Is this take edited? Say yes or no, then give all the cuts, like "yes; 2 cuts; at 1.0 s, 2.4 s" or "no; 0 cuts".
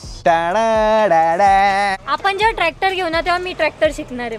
yes; 1 cut; at 2.0 s